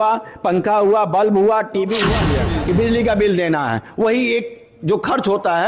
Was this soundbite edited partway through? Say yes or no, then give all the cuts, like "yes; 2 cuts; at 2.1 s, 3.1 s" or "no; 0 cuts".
yes; 1 cut; at 2.3 s